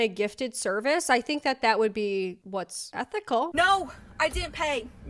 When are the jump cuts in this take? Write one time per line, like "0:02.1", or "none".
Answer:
0:03.5